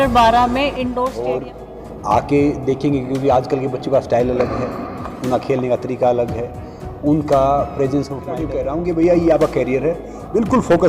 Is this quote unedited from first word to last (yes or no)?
no